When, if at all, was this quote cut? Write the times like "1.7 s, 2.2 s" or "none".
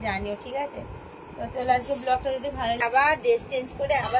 2.8 s